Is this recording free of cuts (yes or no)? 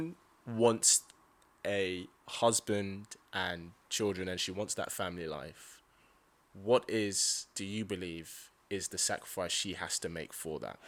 yes